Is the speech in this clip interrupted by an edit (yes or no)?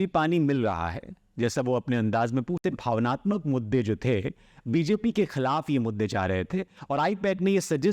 yes